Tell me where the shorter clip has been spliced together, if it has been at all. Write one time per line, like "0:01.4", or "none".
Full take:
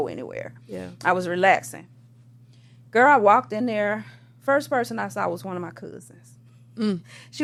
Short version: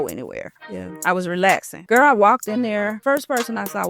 0:01.7
0:03.0